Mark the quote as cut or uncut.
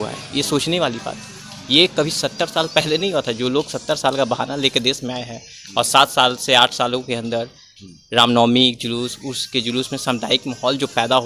uncut